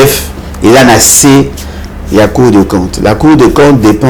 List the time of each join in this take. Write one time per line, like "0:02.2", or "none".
none